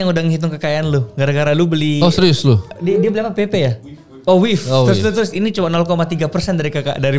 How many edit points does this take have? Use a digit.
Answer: 1